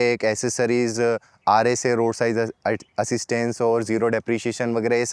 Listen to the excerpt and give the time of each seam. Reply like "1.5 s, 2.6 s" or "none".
none